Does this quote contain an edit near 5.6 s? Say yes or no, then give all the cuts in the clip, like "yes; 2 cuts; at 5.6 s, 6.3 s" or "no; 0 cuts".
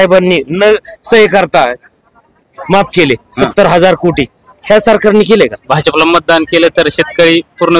yes; 1 cut; at 5.6 s